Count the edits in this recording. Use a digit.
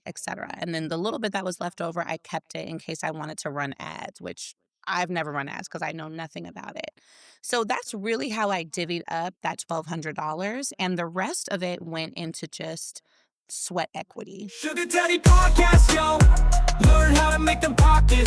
1